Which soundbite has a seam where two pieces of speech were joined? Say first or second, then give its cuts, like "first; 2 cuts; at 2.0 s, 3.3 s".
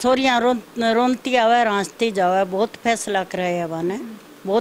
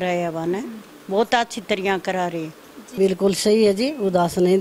second; 1 cut; at 3.0 s